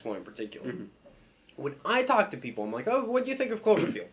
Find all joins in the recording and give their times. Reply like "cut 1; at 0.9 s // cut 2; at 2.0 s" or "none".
none